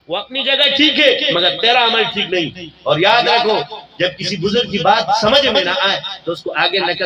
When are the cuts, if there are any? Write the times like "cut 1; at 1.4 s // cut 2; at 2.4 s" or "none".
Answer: none